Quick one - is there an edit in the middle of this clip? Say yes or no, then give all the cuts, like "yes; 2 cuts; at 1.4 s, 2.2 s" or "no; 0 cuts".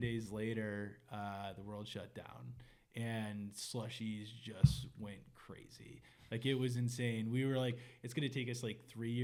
no; 0 cuts